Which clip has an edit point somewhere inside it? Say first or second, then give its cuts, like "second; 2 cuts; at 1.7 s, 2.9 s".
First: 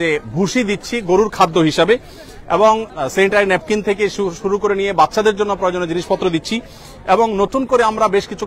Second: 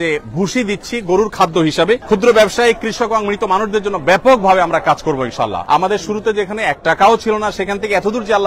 second; 2 cuts; at 2.0 s, 5.6 s